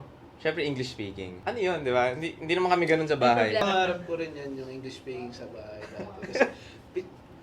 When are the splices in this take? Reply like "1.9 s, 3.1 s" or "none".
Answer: 1.4 s, 3.6 s